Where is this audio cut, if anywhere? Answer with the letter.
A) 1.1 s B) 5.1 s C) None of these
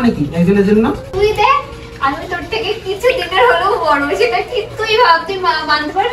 A